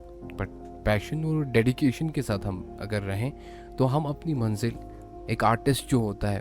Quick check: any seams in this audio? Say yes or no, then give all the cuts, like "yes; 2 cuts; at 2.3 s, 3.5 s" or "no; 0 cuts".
yes; 1 cut; at 5.1 s